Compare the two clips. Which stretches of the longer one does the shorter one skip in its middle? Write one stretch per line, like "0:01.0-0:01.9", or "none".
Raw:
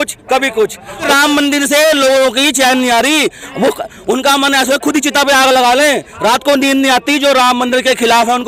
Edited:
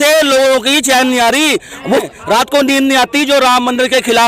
0:03.9-0:06.1